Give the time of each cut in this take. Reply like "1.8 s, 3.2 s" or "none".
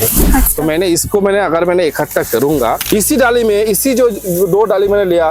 2.8 s